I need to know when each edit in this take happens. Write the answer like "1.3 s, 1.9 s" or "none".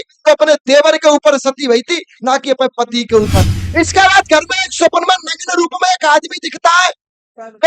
3.6 s